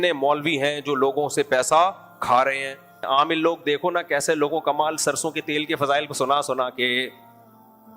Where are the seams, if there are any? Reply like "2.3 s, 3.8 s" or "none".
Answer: 2.9 s, 7.1 s

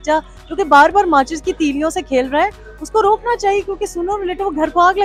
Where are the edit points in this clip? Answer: none

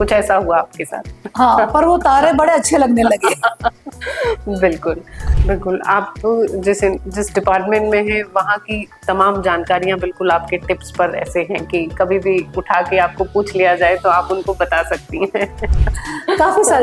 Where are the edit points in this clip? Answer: 5.3 s

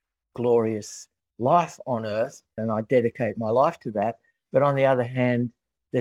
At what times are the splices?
2.6 s

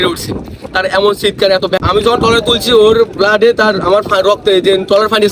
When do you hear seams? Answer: 1.8 s

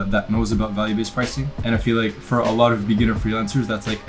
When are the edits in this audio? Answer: 1.5 s

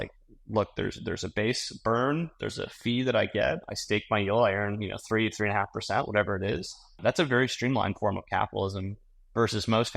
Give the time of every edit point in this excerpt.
7.0 s

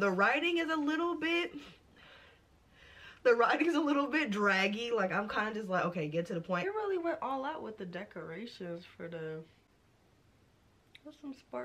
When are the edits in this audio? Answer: 6.6 s

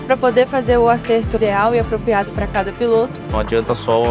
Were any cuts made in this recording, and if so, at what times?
1.4 s, 3.2 s

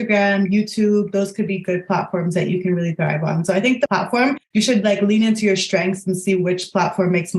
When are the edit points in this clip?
4.2 s

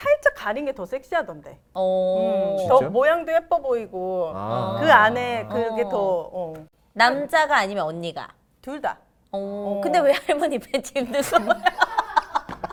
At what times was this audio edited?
none

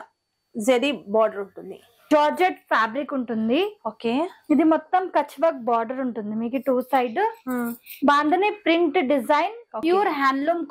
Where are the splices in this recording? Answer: 2.1 s, 9.7 s

